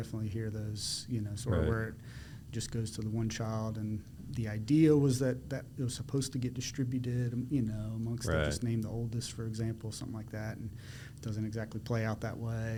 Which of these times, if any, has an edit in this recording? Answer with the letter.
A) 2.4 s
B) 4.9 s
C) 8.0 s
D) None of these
D